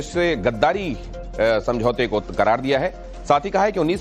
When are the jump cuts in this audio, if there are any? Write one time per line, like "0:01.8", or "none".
0:02.0